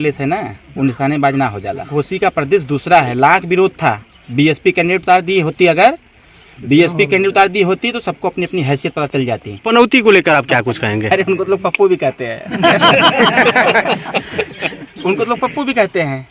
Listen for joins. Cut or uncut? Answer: cut